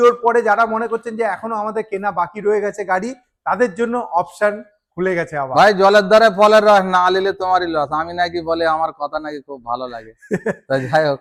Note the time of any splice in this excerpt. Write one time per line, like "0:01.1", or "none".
none